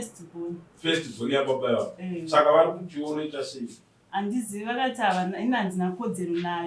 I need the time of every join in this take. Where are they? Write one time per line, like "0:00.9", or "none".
none